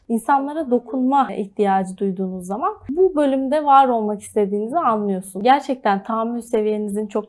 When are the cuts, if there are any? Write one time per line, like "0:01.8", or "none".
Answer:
0:01.3
0:02.8
0:05.4